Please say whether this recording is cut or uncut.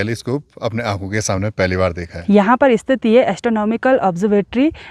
cut